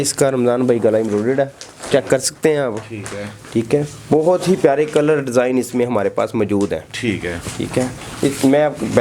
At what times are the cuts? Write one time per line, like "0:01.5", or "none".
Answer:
none